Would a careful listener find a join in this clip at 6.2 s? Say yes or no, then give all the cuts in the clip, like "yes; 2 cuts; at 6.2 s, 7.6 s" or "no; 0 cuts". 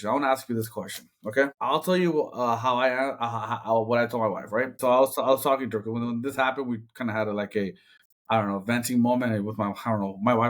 no; 2 cuts; at 1.6 s, 4.7 s